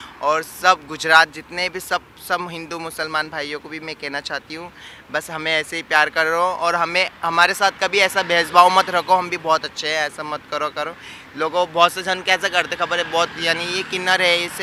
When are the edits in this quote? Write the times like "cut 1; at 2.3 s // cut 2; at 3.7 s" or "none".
none